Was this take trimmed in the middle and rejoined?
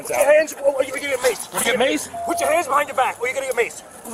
no; 0 cuts

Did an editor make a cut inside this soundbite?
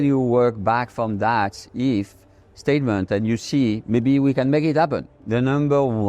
yes; 1 cut; at 5.0 s

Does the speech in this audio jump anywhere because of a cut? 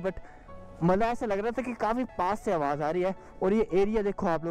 no; 0 cuts

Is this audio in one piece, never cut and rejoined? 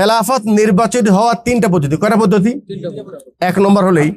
yes; 0 cuts

